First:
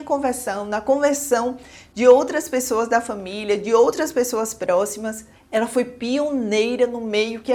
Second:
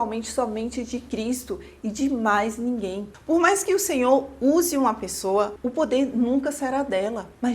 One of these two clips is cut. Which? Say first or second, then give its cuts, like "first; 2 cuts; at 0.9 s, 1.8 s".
second; 1 cut; at 3.1 s